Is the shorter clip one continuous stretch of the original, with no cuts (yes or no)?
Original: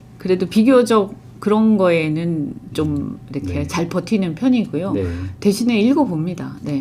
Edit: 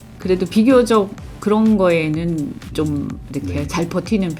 yes